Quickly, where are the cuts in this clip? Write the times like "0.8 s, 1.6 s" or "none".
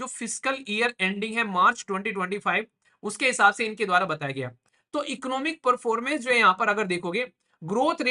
4.6 s